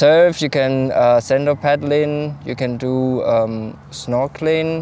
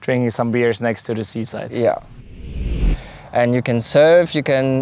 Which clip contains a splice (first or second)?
second